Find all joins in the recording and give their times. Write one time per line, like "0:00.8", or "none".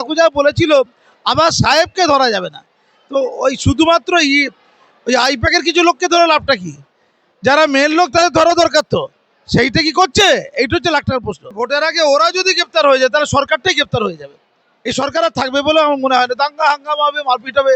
0:11.5